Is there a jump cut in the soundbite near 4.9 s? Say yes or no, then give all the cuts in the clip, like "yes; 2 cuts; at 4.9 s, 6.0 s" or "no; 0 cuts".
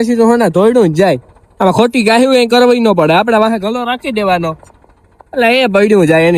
no; 0 cuts